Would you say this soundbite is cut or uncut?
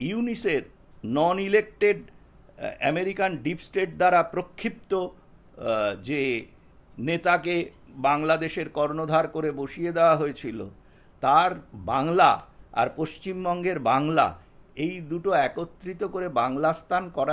uncut